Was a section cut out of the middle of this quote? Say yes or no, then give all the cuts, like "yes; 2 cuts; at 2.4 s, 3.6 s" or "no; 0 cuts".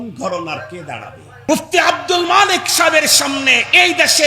yes; 1 cut; at 1.5 s